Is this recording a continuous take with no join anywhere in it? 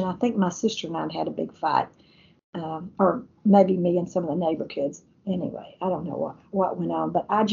yes; 0 cuts

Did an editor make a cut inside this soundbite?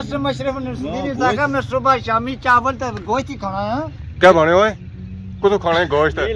yes; 1 cut; at 4.0 s

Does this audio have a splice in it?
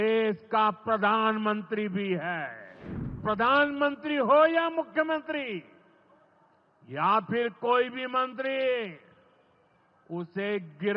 yes; 1 cut; at 3.2 s

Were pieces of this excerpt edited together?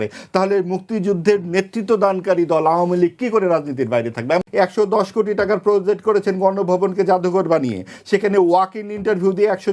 yes; 1 cut; at 4.5 s

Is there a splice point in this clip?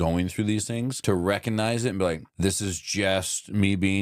yes; 2 cuts; at 1.0 s, 2.3 s

